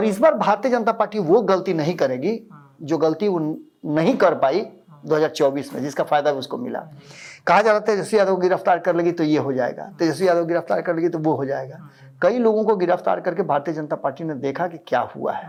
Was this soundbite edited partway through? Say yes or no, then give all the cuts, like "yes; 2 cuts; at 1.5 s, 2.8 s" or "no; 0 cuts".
no; 0 cuts